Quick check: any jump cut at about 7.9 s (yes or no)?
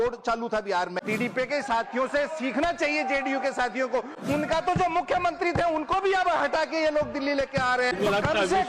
yes